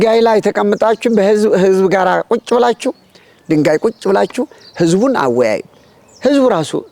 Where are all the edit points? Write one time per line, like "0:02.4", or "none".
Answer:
0:03.3